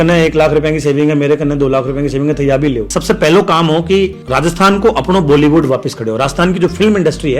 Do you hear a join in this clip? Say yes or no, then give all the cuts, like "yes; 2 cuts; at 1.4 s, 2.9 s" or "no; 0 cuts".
yes; 1 cut; at 2.9 s